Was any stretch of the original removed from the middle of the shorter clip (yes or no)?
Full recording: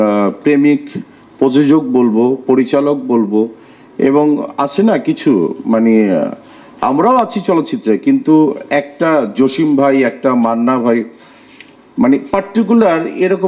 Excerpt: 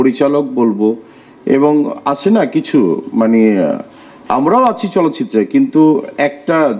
no